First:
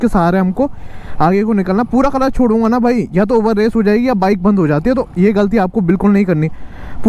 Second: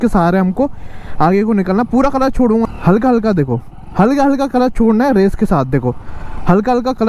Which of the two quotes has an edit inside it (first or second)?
second